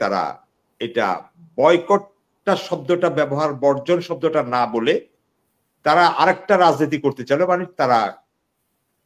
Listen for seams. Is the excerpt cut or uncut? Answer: uncut